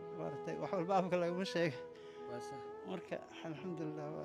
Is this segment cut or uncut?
uncut